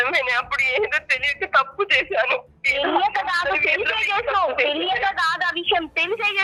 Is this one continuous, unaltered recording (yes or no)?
yes